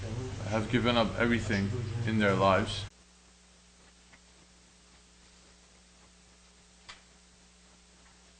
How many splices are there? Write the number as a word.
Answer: zero